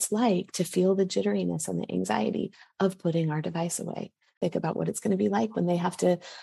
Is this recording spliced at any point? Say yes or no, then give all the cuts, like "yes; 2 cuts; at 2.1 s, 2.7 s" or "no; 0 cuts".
yes; 1 cut; at 4.4 s